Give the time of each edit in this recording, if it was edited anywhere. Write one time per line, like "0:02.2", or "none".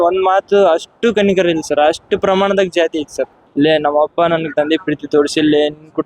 0:03.4